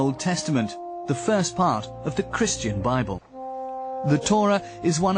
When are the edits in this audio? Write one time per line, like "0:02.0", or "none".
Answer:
0:02.9